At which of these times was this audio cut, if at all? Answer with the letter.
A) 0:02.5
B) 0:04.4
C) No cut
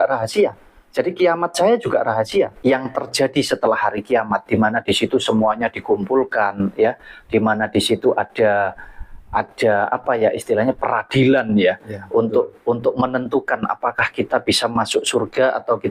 A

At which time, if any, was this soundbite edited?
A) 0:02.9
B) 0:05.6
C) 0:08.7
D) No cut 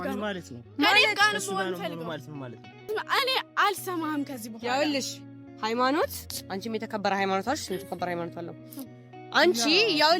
A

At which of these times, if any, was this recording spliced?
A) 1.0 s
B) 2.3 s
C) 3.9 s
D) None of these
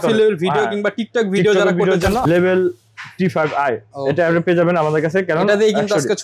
B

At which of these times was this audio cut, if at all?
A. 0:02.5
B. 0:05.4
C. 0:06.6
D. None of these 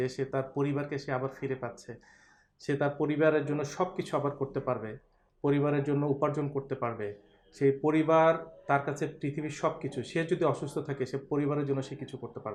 D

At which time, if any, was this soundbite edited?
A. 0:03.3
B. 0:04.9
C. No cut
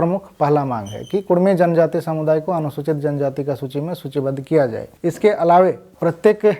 C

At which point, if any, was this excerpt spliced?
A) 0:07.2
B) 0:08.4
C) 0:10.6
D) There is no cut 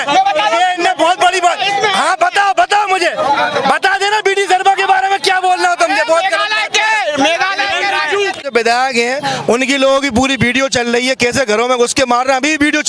B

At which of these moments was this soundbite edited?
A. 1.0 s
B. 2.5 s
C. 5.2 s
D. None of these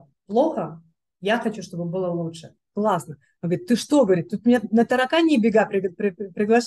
B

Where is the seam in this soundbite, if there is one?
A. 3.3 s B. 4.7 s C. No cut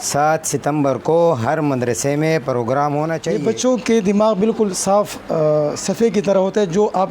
A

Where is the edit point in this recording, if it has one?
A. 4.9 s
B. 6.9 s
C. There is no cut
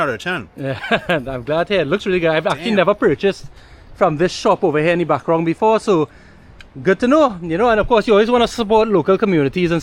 C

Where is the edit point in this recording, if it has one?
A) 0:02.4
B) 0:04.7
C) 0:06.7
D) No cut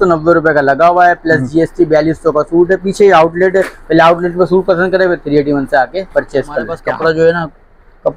C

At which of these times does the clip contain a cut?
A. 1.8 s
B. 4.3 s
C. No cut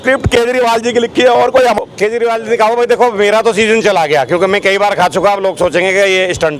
A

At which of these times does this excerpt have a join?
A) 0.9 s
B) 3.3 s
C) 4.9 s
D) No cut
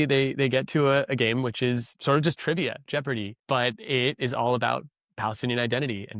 B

